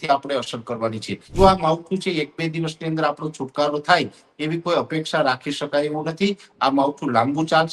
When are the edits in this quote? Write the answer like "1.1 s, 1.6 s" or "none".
1.3 s